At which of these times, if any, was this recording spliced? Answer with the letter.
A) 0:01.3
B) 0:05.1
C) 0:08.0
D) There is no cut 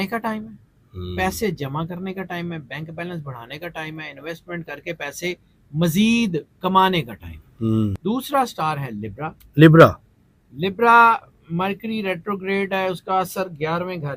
C